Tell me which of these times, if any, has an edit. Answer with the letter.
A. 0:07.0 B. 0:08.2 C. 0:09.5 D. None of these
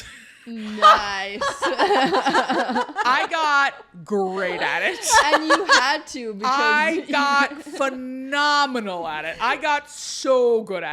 D